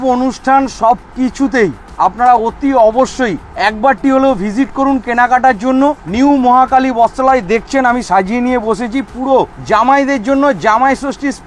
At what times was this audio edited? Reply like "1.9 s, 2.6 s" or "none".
1.8 s, 3.4 s, 6.0 s, 9.6 s